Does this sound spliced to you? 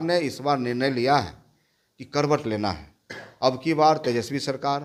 no; 0 cuts

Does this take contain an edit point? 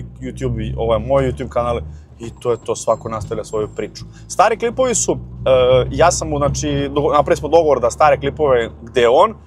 no; 0 cuts

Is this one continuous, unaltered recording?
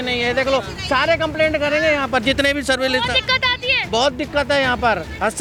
yes; 0 cuts

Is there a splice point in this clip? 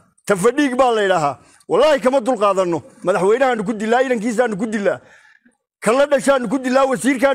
no; 0 cuts

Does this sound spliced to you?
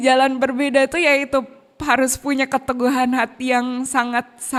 no; 0 cuts

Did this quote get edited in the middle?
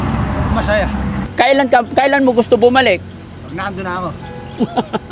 yes; 1 cut; at 1.2 s

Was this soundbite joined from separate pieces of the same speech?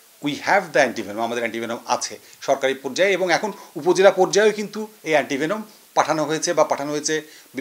no; 0 cuts

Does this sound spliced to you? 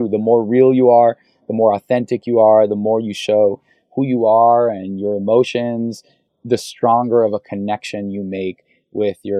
no; 0 cuts

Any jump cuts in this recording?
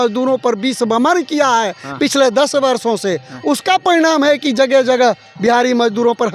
no; 0 cuts

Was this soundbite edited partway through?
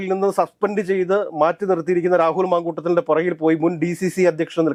no; 0 cuts

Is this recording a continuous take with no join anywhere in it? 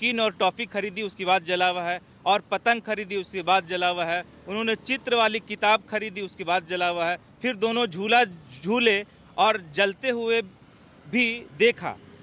yes; 0 cuts

